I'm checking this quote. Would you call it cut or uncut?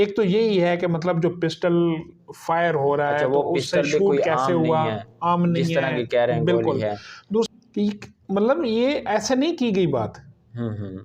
cut